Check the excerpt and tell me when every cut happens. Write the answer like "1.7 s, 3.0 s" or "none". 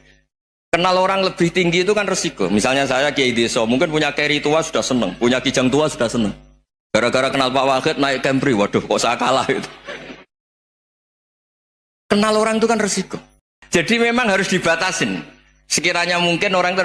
13.6 s